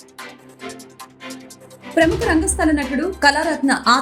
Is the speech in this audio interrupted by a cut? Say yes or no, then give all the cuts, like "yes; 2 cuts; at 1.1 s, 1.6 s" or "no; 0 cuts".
yes; 1 cut; at 1.3 s